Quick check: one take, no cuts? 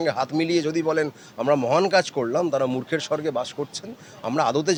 yes; 0 cuts

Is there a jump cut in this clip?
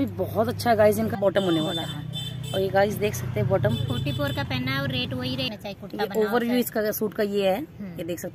yes; 2 cuts; at 1.2 s, 5.5 s

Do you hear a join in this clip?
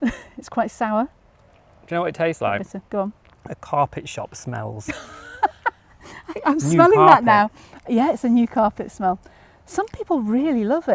no; 0 cuts

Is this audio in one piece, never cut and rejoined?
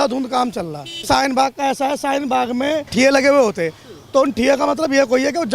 no; 2 cuts; at 1.0 s, 2.9 s

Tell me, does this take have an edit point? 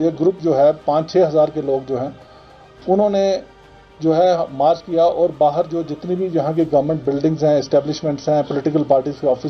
no; 0 cuts

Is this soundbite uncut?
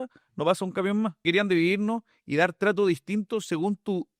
no; 1 cut; at 1.2 s

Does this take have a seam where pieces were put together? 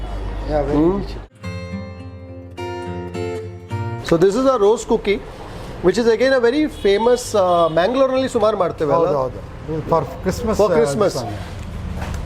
yes; 1 cut; at 1.3 s

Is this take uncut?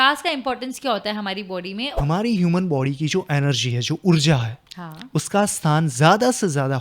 no; 1 cut; at 1.9 s

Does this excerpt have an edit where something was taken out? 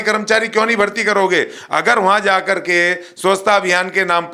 no; 0 cuts

